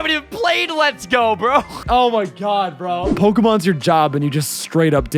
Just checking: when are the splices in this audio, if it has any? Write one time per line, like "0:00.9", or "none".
0:01.8
0:03.1